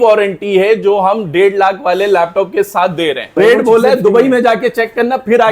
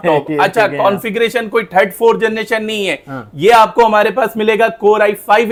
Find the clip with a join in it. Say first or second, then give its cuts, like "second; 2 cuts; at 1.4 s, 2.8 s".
first; 1 cut; at 3.3 s